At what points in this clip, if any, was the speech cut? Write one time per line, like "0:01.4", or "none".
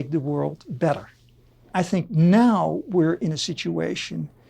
0:01.7